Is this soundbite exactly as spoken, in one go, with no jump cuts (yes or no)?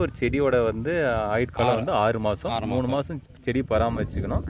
yes